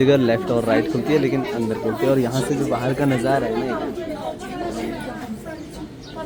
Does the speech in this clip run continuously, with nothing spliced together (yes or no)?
yes